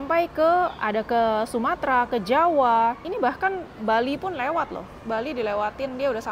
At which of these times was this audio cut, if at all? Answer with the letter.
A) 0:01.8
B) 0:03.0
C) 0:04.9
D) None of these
B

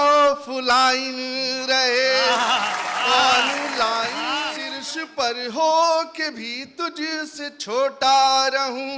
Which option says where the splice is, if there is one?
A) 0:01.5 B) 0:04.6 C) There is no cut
B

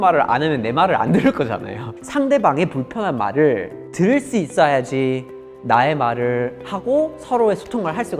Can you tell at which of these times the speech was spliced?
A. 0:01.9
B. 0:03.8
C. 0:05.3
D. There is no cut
B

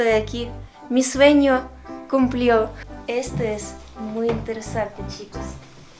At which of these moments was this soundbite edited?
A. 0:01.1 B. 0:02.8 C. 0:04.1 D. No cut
B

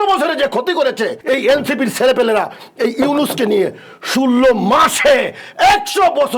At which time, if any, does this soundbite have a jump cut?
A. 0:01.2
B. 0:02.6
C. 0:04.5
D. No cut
A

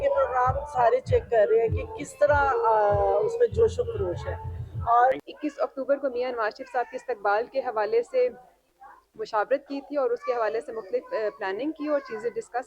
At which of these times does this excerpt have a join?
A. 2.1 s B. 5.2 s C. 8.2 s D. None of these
B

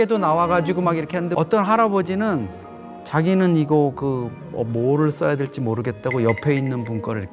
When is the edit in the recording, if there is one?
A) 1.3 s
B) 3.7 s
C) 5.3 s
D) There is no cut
A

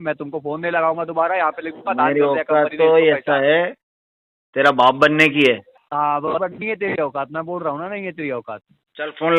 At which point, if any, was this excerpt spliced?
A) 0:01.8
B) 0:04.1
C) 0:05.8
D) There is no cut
C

